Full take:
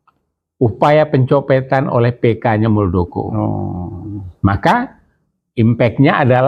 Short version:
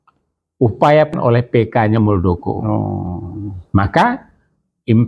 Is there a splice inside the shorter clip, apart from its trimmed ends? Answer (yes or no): yes